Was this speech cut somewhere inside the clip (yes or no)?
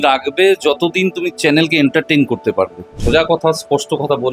yes